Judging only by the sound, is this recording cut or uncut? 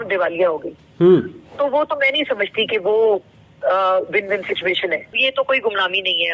cut